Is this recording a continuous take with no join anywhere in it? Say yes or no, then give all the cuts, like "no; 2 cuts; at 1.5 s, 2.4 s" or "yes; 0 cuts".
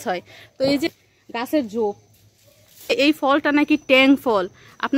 no; 2 cuts; at 0.9 s, 2.9 s